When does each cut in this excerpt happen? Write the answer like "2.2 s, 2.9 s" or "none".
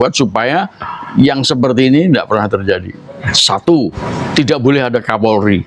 3.4 s, 4.0 s